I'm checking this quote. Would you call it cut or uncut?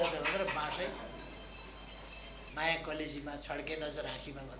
cut